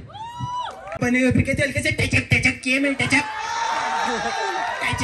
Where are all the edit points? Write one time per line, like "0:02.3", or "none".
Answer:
0:01.0